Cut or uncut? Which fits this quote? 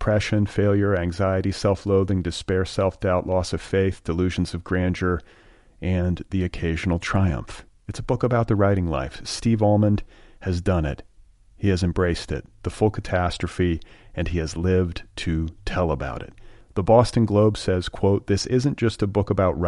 uncut